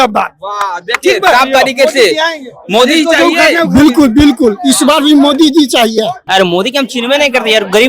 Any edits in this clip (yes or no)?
yes